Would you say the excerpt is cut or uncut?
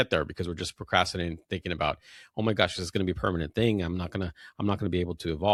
uncut